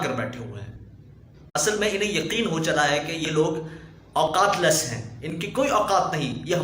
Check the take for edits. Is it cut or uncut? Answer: cut